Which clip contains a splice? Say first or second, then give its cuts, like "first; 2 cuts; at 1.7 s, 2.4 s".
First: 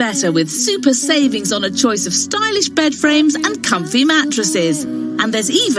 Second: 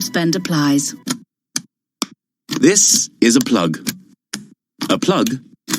second; 1 cut; at 1.1 s